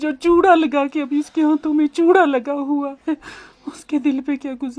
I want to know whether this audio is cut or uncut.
uncut